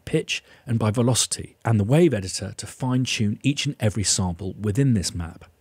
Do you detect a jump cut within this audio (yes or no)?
no